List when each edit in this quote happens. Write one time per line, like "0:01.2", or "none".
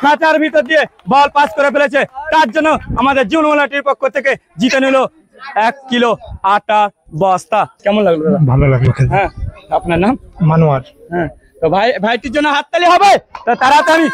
0:07.8